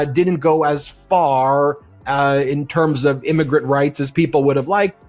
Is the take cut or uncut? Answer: uncut